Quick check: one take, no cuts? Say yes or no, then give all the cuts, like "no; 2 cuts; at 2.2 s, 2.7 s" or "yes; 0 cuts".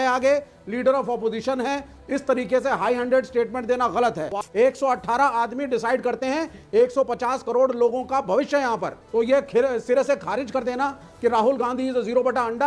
no; 2 cuts; at 4.2 s, 9.0 s